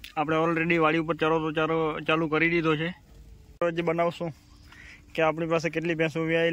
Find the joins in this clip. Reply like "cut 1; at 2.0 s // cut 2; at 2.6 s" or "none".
cut 1; at 3.6 s